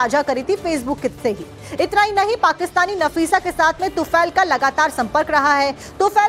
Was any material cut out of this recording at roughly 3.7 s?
no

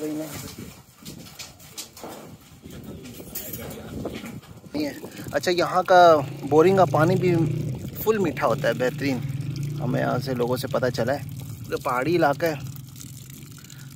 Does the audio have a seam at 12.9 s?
no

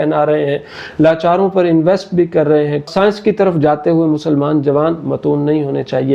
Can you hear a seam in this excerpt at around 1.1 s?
no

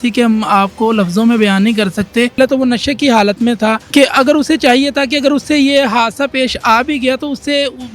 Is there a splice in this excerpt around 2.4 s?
yes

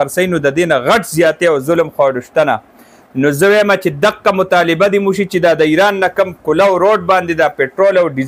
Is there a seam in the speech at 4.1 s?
no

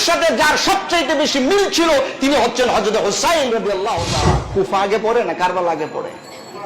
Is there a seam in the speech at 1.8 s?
no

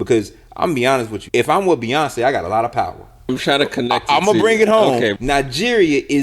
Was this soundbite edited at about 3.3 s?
yes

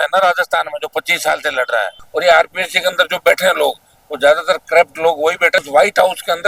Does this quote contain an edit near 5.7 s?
yes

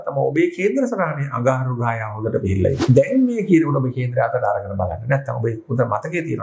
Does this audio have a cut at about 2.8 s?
yes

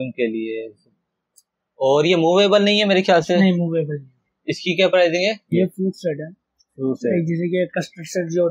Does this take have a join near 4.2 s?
no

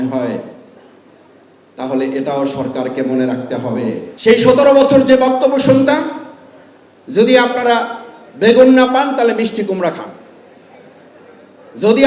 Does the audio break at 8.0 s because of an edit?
no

